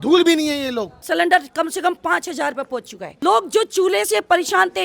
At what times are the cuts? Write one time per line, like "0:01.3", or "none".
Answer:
0:01.0
0:03.1